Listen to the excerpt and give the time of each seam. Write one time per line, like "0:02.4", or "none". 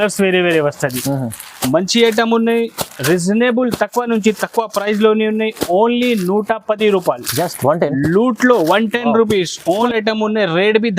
0:09.8